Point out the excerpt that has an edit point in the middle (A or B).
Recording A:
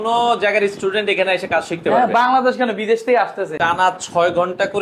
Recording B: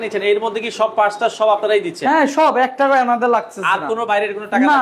A